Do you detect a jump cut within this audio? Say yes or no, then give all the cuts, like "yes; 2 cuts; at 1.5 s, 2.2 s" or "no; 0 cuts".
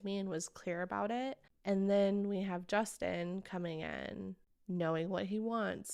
yes; 2 cuts; at 1.5 s, 4.5 s